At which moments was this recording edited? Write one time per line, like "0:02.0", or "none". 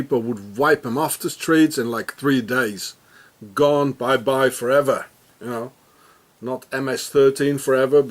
none